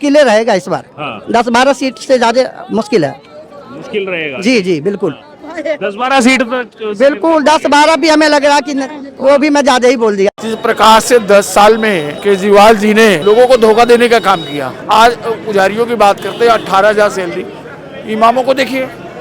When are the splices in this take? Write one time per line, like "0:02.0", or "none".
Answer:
0:10.4
0:12.1
0:13.2
0:14.8